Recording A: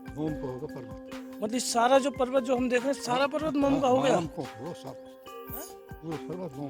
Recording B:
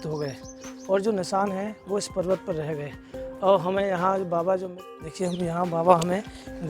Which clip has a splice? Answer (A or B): B